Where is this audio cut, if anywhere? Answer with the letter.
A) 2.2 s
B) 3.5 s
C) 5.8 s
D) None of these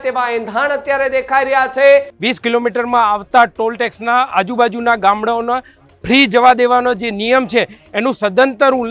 A